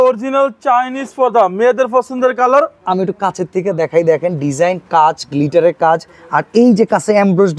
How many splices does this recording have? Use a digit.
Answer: 0